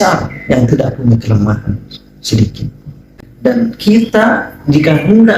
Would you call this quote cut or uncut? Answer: cut